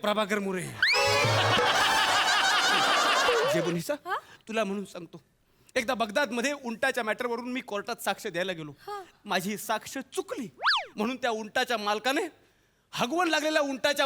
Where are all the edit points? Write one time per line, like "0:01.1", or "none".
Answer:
0:03.6